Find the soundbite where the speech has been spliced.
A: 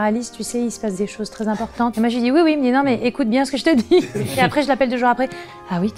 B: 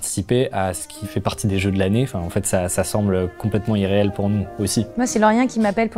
B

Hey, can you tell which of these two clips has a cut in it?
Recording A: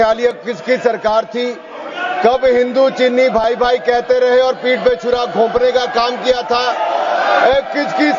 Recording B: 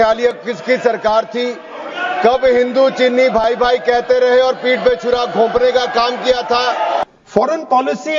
B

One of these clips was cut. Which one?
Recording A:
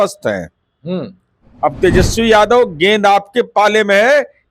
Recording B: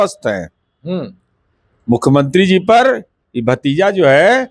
A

